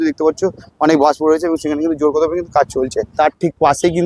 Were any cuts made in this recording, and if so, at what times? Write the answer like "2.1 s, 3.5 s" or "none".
3.1 s